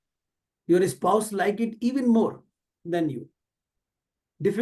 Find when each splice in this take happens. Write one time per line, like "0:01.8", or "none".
none